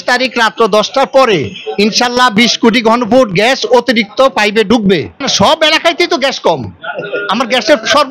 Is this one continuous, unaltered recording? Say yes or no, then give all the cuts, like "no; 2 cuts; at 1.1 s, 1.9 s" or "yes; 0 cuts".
no; 1 cut; at 5.3 s